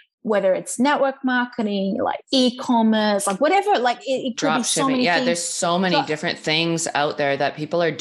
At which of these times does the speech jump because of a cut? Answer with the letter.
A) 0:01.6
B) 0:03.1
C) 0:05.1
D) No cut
D